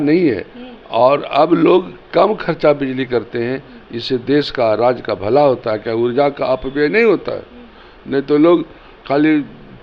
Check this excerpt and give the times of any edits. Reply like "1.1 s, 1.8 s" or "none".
none